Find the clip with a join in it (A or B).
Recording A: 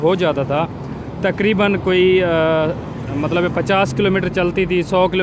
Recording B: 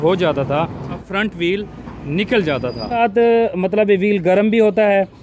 B